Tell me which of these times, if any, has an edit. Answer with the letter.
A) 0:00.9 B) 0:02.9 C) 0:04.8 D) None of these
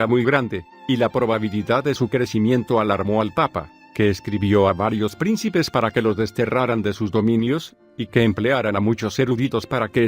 B